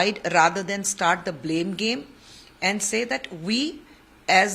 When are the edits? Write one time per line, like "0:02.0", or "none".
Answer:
none